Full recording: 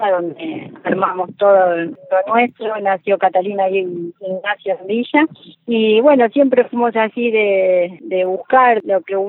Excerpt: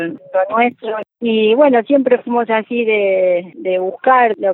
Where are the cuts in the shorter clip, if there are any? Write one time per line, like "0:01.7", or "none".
0:01.0